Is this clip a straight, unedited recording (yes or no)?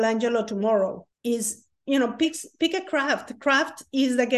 no